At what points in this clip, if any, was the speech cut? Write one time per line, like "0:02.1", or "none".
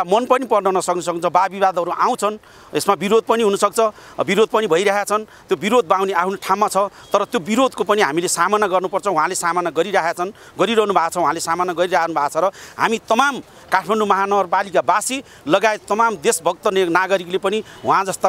none

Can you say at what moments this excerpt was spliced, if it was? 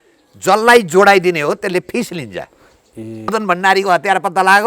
0:03.3

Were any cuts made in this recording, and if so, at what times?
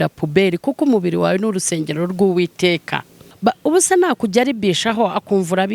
0:03.2

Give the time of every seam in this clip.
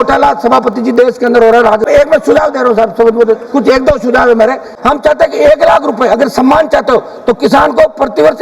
0:01.9
0:04.7

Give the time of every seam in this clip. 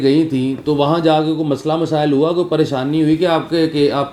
none

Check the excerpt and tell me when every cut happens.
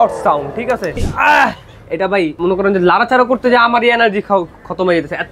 0:01.1
0:02.3

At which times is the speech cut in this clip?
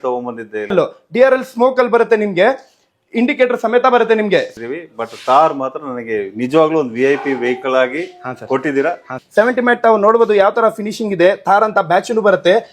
0:00.7
0:04.5
0:09.2

